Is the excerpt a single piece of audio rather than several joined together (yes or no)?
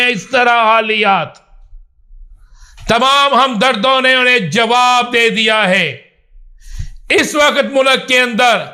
yes